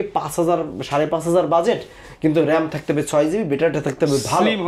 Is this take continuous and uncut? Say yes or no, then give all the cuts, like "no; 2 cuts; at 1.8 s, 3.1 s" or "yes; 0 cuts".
yes; 0 cuts